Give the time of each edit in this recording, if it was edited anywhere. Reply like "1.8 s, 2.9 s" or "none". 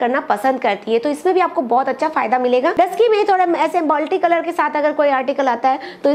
2.7 s

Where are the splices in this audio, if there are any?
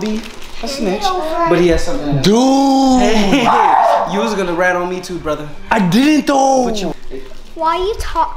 6.9 s

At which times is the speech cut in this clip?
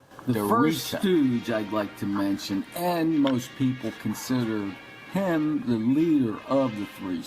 1.0 s

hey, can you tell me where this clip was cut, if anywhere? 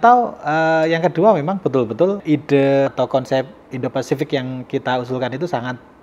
2.2 s, 2.9 s

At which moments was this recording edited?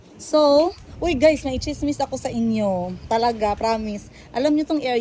none

